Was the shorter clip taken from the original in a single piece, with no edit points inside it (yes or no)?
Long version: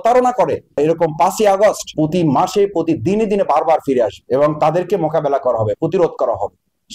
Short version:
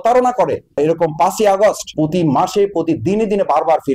yes